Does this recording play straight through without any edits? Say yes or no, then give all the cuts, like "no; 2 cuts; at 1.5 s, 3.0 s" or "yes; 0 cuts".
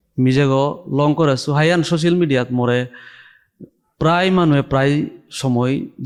yes; 0 cuts